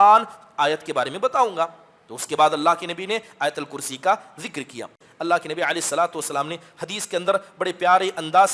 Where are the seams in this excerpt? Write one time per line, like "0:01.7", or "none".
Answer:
0:05.0